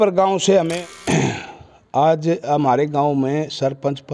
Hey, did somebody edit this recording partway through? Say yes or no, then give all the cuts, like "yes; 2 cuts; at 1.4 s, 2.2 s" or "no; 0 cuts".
yes; 1 cut; at 0.9 s